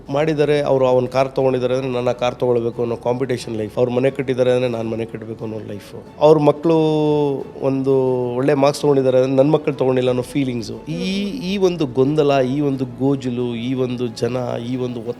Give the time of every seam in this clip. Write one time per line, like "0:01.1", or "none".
0:03.7
0:06.0